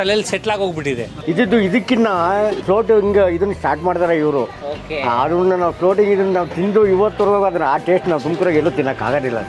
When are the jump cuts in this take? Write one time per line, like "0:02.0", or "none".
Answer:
0:01.1
0:02.6